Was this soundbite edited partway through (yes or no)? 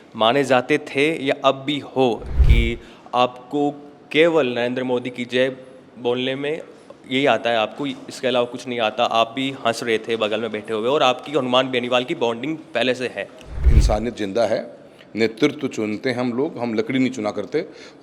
yes